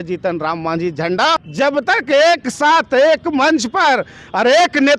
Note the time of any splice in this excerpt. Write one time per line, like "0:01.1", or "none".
0:01.5